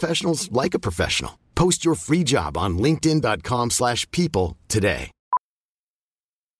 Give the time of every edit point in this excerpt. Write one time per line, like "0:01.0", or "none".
none